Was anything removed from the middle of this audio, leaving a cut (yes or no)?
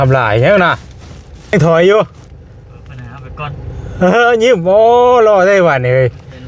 yes